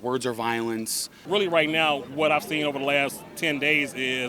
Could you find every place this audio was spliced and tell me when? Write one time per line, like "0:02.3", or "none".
0:01.1